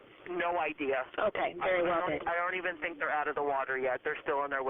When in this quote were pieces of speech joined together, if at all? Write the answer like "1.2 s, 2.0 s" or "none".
1.3 s